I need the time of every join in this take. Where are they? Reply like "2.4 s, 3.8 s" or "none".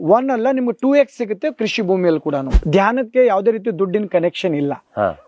2.5 s

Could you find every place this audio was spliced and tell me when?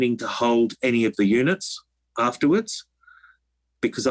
none

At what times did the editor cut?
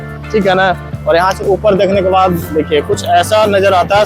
0.9 s

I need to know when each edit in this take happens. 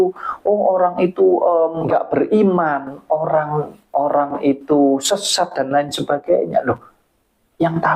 1.8 s

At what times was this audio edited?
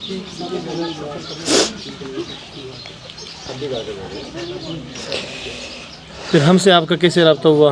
none

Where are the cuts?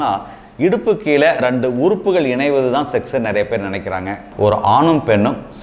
4.2 s

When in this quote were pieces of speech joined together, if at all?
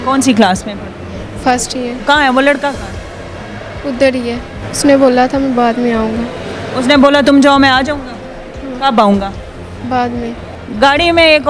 2.0 s, 4.6 s, 10.5 s

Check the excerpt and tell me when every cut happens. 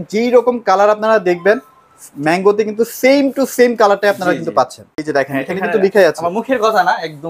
4.9 s

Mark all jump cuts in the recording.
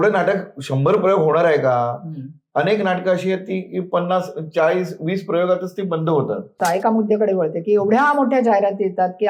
6.6 s

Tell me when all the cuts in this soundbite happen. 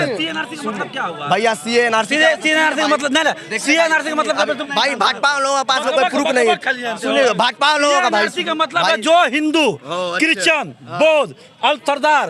4.6 s

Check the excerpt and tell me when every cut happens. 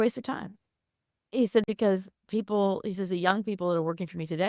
none

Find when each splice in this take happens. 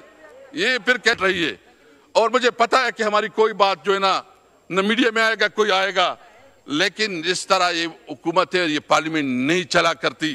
1.2 s

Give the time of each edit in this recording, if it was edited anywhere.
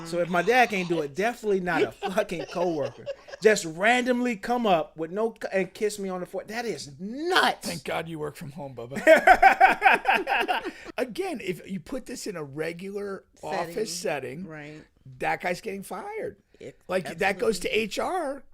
10.8 s

